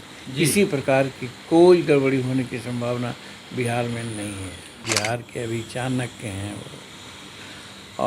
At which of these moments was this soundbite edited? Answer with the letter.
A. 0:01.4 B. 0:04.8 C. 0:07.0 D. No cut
B